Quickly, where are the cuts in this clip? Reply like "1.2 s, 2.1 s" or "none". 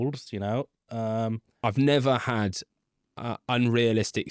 1.6 s